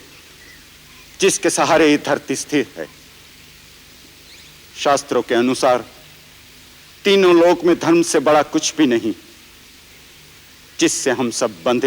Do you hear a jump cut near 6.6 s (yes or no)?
no